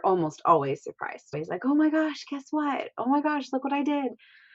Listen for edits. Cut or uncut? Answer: cut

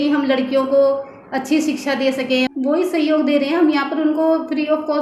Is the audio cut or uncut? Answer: cut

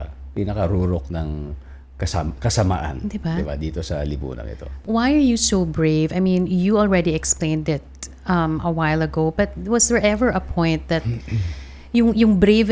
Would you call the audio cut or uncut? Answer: uncut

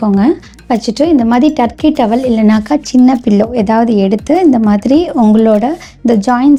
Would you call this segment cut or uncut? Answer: uncut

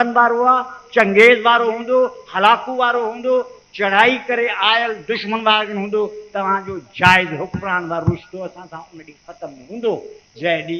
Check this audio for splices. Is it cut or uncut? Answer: uncut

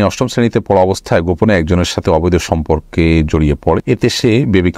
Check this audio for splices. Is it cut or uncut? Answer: cut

